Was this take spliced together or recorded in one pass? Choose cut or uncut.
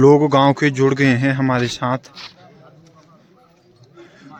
uncut